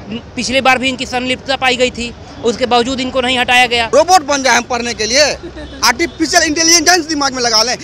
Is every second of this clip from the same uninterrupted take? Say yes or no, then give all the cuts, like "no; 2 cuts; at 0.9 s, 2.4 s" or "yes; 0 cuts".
no; 1 cut; at 3.9 s